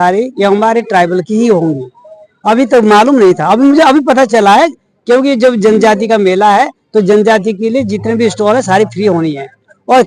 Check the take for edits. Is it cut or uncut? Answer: uncut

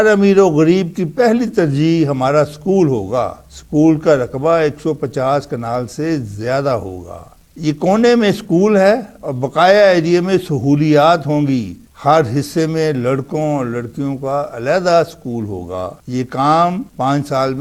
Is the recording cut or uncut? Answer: cut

